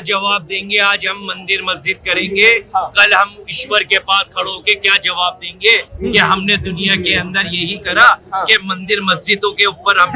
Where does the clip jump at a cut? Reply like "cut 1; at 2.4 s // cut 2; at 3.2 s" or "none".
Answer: none